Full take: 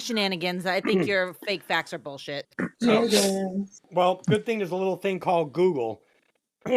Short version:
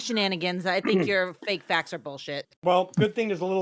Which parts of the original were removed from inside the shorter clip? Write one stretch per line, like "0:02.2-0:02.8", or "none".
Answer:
0:02.5-0:03.8

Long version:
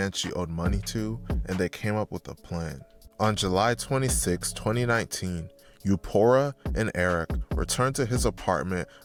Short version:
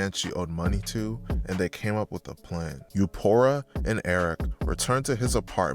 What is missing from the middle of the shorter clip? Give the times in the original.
0:02.8-0:05.7

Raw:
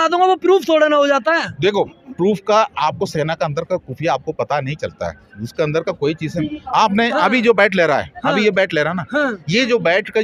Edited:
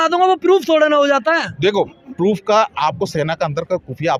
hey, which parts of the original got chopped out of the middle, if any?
none

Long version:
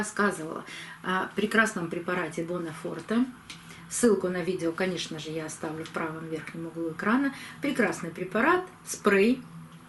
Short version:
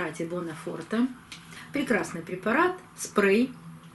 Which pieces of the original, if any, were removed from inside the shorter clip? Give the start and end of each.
0:03.8-0:07.5

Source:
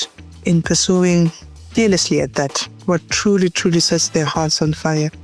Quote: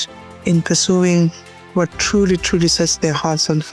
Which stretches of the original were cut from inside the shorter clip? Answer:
0:01.5-0:02.6

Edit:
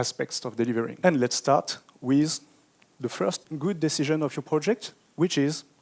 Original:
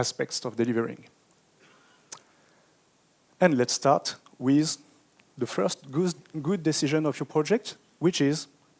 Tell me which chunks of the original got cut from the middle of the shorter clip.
0:00.9-0:03.3
0:05.8-0:06.3

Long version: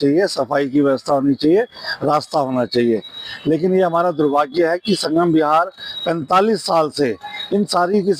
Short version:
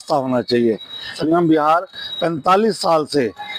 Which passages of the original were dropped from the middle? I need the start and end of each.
0:03.4-0:05.0

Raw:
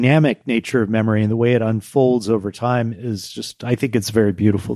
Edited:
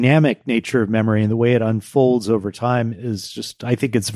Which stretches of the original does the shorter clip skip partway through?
none

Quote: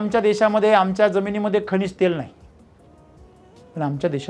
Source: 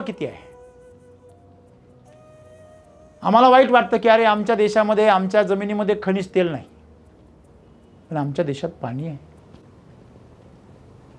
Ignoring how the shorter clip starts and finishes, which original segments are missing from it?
none

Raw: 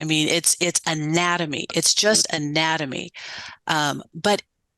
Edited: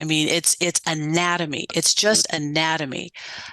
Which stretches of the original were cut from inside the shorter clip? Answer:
none

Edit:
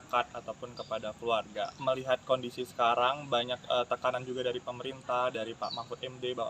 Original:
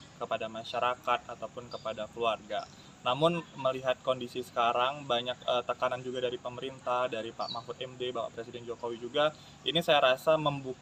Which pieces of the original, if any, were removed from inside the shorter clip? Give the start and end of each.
0:02.7-0:03.5

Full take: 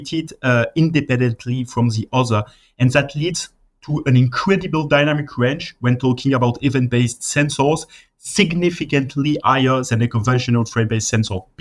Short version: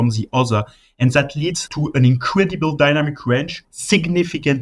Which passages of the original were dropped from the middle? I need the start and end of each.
0:03.5-0:03.8
0:05.7-0:08.0

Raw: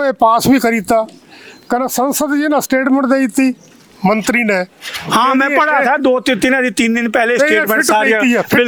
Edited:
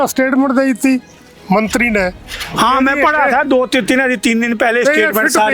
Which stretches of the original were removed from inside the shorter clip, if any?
none

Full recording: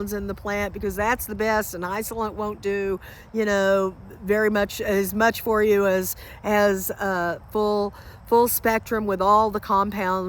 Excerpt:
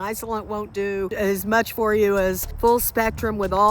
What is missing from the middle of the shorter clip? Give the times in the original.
0:03.0-0:04.8
0:06.1-0:08.1

